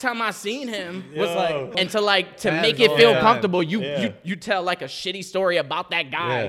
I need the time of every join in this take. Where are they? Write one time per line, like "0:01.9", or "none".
0:01.7